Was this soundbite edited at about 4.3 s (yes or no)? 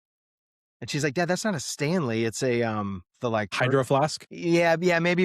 yes